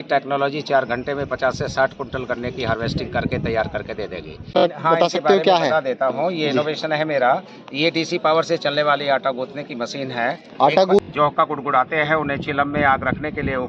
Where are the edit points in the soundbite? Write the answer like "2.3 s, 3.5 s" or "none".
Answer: 4.6 s, 11.0 s